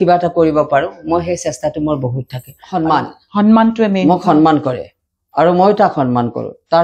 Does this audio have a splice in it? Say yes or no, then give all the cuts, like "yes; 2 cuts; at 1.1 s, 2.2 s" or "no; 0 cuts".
yes; 1 cut; at 2.6 s